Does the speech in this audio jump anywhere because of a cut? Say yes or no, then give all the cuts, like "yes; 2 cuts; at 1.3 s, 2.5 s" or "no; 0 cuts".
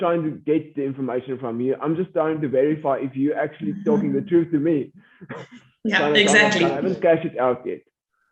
yes; 1 cut; at 6.8 s